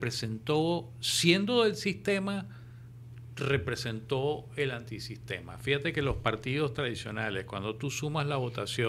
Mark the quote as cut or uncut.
uncut